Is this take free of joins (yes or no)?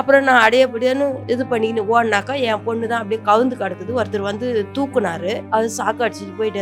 no